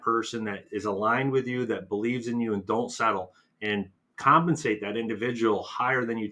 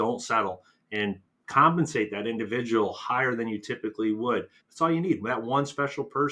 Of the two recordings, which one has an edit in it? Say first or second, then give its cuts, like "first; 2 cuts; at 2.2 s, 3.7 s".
second; 1 cut; at 4.6 s